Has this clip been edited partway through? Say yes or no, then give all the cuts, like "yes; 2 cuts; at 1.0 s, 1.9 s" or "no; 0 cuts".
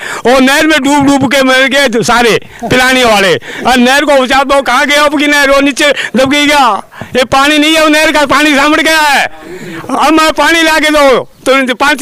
no; 0 cuts